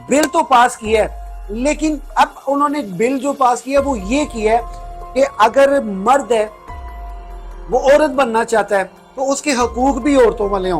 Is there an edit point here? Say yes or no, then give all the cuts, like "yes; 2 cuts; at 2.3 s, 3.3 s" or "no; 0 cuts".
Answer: no; 0 cuts